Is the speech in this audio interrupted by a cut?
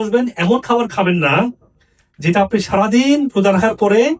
no; 0 cuts

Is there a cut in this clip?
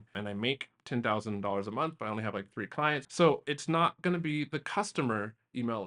yes; 1 cut; at 3.1 s

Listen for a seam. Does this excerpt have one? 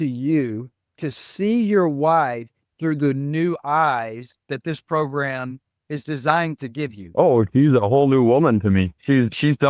no; 0 cuts

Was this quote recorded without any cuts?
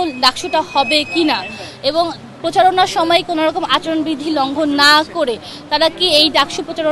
yes; 0 cuts

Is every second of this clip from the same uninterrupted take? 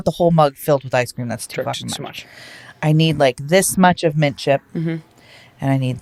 yes; 0 cuts

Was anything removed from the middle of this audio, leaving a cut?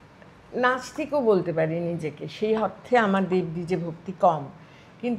no; 0 cuts

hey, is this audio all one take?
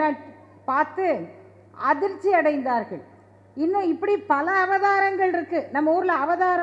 yes; 0 cuts

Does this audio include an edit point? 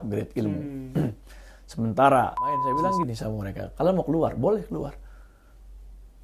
yes; 1 cut; at 2.8 s

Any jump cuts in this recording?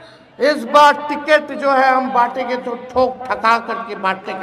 no; 0 cuts

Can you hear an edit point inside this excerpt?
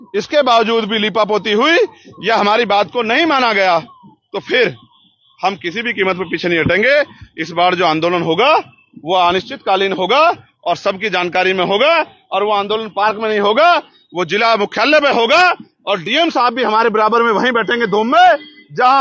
no; 0 cuts

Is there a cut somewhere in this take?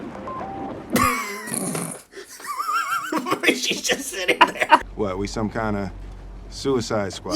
yes; 1 cut; at 4.8 s

